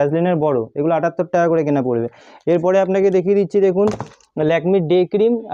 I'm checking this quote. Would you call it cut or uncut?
uncut